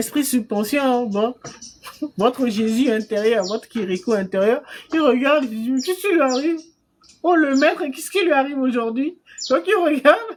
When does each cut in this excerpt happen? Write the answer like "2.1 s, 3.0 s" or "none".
none